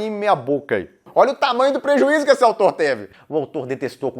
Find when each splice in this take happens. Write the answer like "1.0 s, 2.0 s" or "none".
1.0 s, 3.1 s